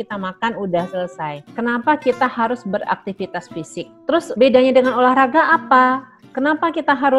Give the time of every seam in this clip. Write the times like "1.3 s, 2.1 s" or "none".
1.4 s, 4.3 s